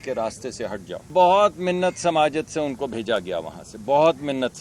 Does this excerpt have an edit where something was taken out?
yes; 1 cut; at 1.1 s

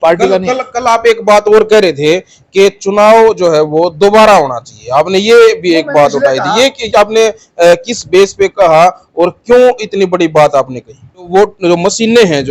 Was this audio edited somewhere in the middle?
yes; 1 cut; at 11.3 s

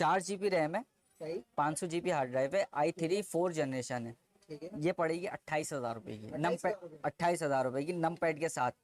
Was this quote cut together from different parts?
no; 0 cuts

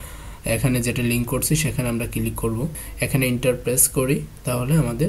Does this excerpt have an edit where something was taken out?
yes; 1 cut; at 2.8 s

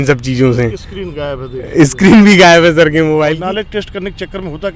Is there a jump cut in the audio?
yes; 1 cut; at 3.4 s

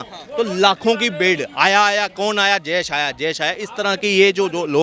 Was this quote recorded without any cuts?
yes; 0 cuts

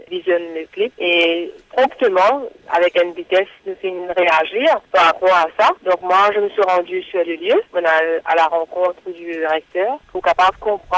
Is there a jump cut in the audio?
yes; 1 cut; at 1.4 s

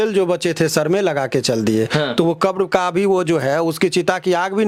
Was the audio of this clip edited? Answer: no; 0 cuts

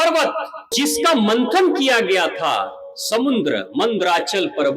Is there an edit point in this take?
yes; 1 cut; at 1.0 s

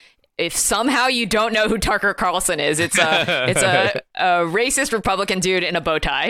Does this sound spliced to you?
no; 0 cuts

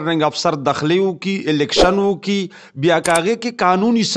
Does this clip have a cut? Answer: no; 0 cuts

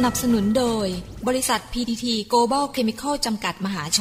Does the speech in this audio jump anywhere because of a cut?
no; 0 cuts

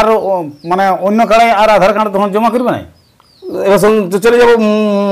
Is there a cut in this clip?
no; 0 cuts

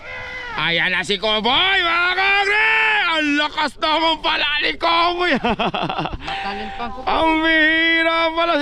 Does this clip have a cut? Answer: yes; 1 cut; at 5.6 s

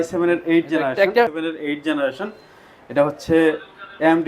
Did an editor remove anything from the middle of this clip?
yes; 1 cut; at 1.3 s

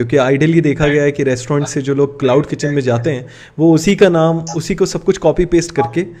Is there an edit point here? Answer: no; 0 cuts

